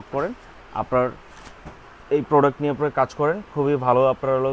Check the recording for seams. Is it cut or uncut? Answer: uncut